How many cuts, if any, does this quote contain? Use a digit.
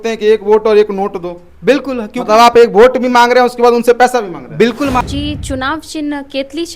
1